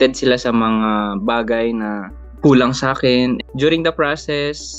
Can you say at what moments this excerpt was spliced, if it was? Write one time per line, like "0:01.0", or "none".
0:03.4